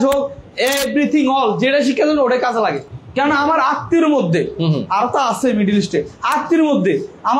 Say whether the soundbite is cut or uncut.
uncut